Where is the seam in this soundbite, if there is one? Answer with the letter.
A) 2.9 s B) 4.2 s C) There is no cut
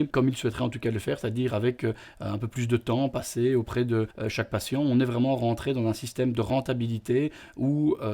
B